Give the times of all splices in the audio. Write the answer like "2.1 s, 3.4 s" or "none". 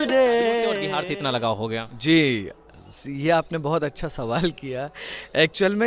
0.9 s